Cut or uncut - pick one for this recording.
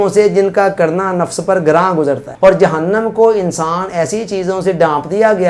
cut